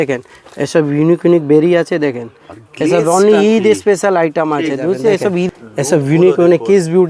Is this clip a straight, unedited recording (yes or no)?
no